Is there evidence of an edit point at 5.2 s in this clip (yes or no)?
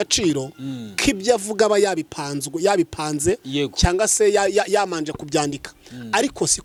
no